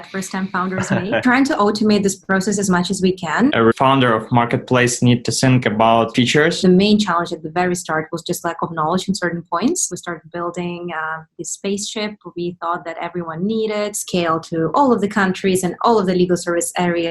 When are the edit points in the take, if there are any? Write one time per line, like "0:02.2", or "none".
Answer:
0:01.2
0:03.5
0:06.6
0:09.8
0:14.0